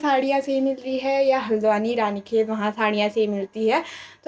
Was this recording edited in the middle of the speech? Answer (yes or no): no